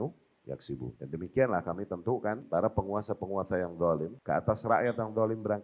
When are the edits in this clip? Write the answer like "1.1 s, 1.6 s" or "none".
1.0 s, 2.4 s, 4.1 s